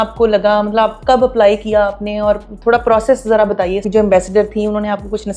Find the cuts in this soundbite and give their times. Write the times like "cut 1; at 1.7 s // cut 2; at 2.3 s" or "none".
cut 1; at 3.8 s